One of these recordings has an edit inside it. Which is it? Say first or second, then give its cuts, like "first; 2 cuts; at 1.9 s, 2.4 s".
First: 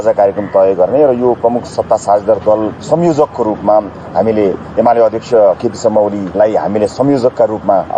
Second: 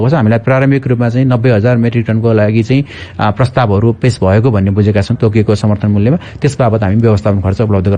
second; 1 cut; at 5.1 s